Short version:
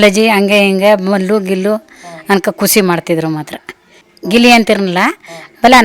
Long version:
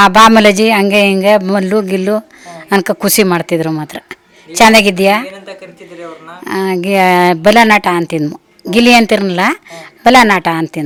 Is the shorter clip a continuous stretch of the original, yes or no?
no